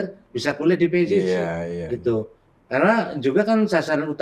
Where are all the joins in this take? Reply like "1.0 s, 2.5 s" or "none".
none